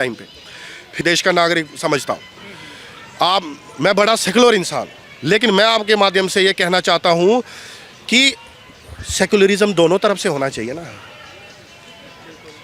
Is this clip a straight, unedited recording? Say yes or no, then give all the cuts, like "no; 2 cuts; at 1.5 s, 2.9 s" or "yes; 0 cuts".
no; 1 cut; at 1.0 s